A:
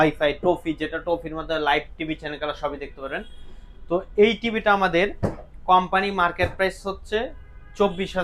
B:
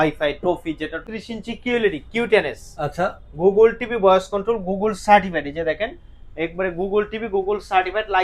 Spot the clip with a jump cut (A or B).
B